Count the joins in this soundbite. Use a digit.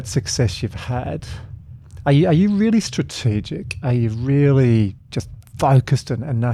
0